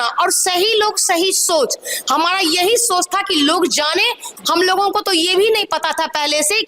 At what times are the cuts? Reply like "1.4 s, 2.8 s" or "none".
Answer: 4.3 s